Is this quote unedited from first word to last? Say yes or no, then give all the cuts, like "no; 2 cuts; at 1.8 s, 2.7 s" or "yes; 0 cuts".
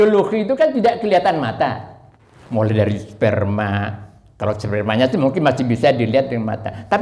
yes; 0 cuts